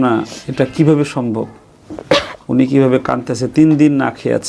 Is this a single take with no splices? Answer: yes; 0 cuts

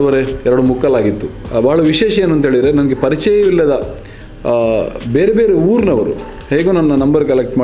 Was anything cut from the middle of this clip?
yes; 1 cut; at 1.3 s

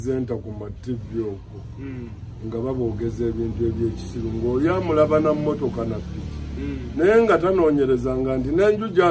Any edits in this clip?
no; 0 cuts

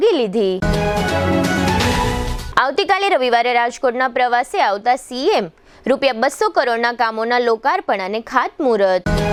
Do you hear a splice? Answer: no; 0 cuts

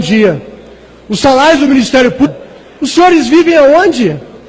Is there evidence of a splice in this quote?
no; 0 cuts

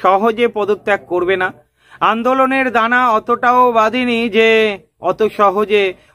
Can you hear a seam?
no; 0 cuts

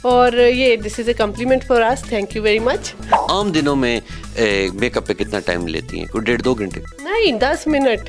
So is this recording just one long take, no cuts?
no; 1 cut; at 3.1 s

